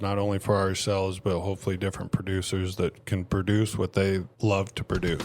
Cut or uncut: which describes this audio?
cut